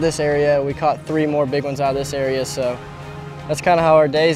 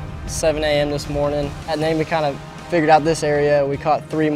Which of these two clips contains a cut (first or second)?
second